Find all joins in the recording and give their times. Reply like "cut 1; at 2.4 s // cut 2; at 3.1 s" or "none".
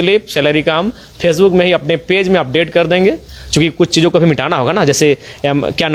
none

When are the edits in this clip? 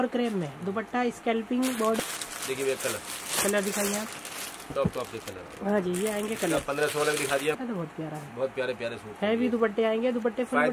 cut 1; at 2.0 s // cut 2; at 7.6 s

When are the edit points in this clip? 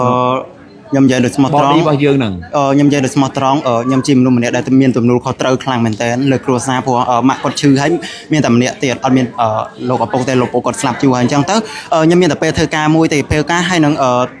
none

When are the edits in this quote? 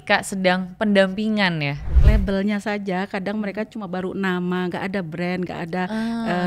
cut 1; at 1.9 s

